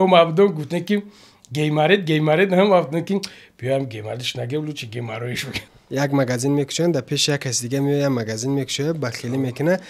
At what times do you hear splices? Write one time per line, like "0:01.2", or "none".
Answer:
0:05.5